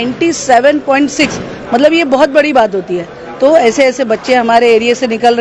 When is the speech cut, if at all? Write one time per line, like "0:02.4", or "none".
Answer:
none